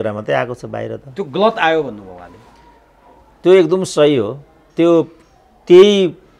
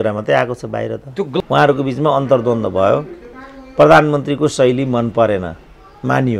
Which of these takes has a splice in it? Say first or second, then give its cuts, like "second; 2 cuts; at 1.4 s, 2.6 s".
second; 1 cut; at 1.4 s